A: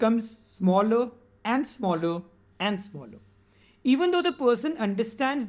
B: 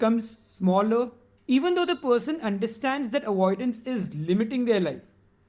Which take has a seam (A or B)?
B